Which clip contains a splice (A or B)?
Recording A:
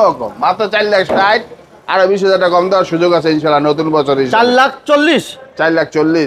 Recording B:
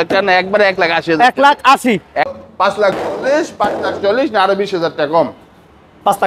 B